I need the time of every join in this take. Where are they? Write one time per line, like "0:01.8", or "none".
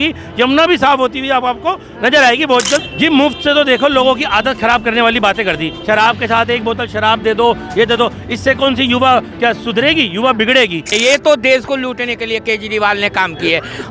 0:02.8
0:10.9